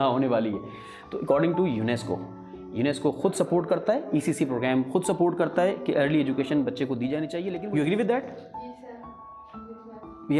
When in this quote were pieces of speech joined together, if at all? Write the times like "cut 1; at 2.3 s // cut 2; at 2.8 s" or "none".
cut 1; at 7.5 s